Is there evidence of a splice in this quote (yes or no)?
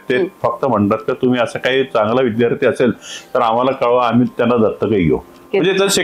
no